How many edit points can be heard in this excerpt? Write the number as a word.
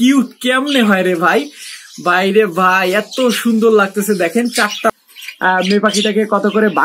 one